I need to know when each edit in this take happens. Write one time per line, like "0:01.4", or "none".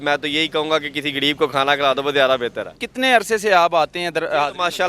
0:02.7